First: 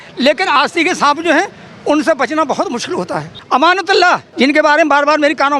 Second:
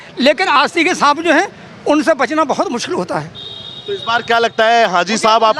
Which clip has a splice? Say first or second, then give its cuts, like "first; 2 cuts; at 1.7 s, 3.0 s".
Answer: first; 2 cuts; at 3.3 s, 4.3 s